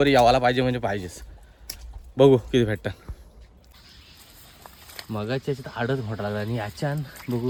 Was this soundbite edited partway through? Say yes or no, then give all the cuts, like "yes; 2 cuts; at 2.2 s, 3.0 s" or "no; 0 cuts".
no; 0 cuts